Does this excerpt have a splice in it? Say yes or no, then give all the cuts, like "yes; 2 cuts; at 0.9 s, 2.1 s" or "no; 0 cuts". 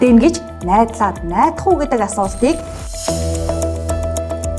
yes; 1 cut; at 2.7 s